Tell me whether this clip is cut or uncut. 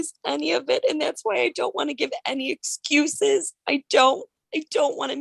uncut